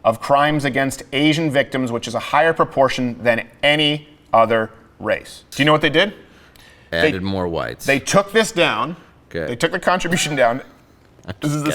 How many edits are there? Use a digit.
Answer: 1